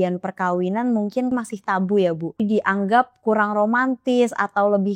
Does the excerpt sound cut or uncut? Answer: cut